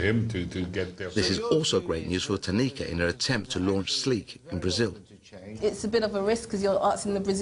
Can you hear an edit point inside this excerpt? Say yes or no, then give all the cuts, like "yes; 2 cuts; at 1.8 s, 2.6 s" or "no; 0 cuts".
no; 0 cuts